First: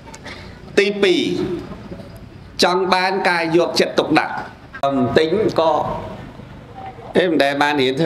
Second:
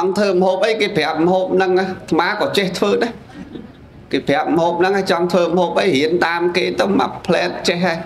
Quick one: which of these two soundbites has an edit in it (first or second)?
first